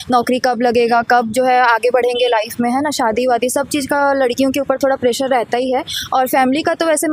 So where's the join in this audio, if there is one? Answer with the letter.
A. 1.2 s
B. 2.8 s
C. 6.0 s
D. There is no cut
D